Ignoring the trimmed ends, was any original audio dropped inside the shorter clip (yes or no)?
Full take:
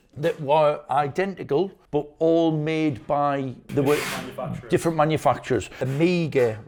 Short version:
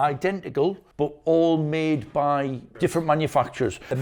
yes